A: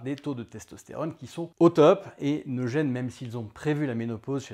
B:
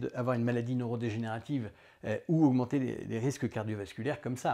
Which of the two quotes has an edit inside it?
A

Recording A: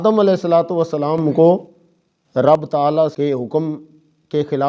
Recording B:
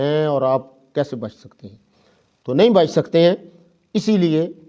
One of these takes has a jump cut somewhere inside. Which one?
A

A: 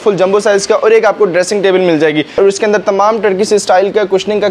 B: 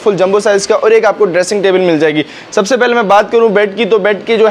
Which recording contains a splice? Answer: A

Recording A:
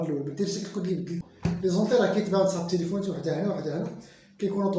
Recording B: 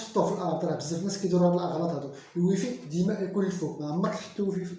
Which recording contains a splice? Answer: A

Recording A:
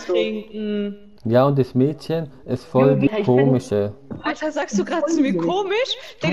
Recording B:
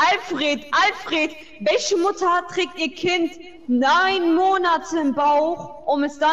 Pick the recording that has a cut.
A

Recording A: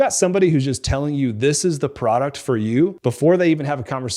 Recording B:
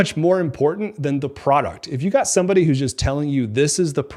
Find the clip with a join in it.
A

